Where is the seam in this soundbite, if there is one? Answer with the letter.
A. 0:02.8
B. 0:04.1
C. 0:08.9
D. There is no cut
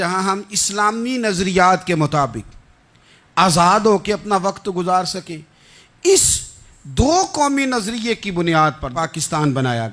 C